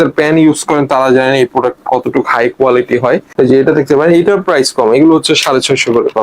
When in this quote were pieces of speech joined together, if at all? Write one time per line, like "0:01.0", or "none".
0:03.3